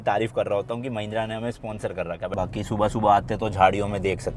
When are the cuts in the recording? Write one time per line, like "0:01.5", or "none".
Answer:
0:02.3